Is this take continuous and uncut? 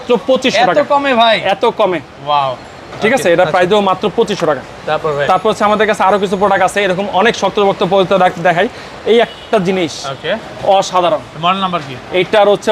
yes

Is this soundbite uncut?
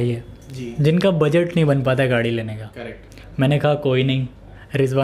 yes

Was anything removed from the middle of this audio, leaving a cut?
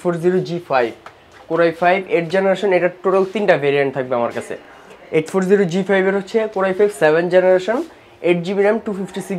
no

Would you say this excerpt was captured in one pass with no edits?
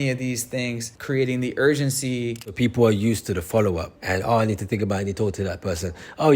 no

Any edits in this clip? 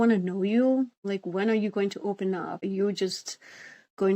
yes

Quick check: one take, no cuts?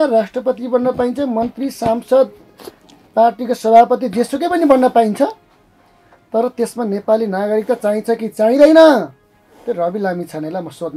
yes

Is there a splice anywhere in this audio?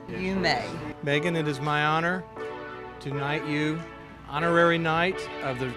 no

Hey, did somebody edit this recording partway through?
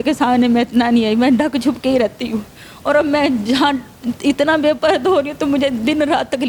no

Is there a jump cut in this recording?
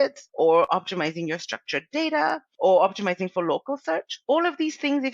no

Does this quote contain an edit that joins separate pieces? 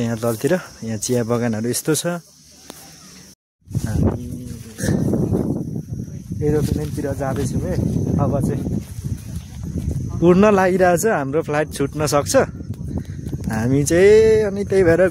yes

